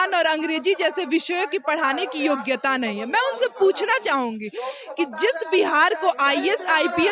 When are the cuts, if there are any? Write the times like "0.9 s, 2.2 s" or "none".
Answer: none